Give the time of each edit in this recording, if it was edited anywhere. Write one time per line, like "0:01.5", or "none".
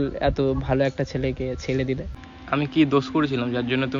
0:02.1

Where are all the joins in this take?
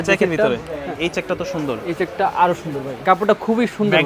0:00.9
0:03.0

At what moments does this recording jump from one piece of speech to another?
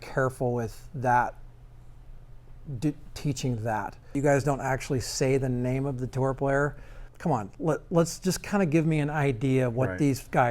0:04.2
0:07.1

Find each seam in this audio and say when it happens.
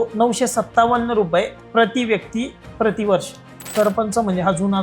0:03.6

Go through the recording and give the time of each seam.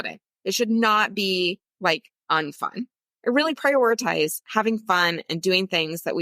0:03.0

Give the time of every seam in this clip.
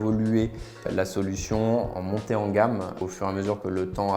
0:00.9
0:01.9
0:03.0

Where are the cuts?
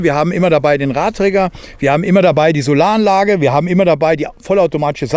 none

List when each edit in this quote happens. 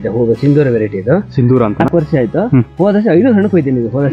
0:01.8

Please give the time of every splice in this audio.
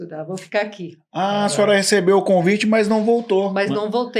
none

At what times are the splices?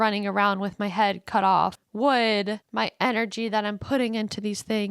0:01.8
0:02.6

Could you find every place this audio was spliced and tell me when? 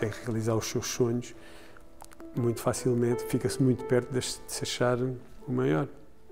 0:05.3

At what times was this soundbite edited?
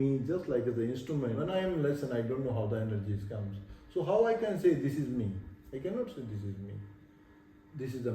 0:01.4

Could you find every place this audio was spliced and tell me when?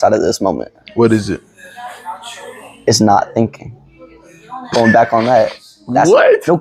none

